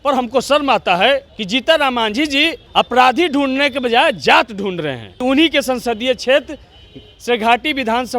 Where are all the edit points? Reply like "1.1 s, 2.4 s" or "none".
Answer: 1.3 s, 2.6 s, 5.1 s